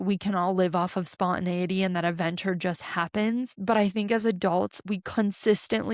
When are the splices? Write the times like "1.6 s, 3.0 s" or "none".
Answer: 3.5 s, 4.8 s